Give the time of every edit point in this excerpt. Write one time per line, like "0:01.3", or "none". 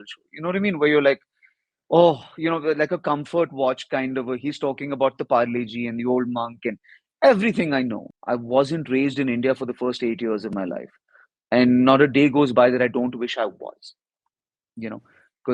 0:08.1